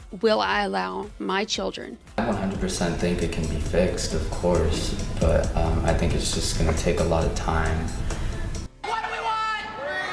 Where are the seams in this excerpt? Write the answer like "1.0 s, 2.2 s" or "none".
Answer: 2.2 s, 8.6 s